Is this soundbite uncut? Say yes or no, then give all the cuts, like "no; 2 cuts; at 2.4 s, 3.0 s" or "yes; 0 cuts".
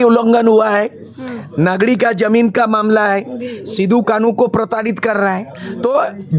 yes; 0 cuts